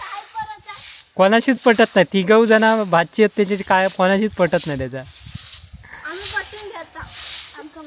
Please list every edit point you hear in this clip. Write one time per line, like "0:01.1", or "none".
none